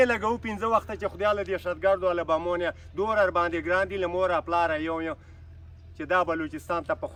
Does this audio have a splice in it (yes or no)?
no